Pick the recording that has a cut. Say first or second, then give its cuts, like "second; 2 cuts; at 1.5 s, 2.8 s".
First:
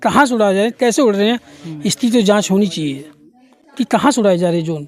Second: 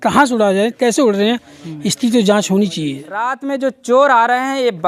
second; 1 cut; at 3.4 s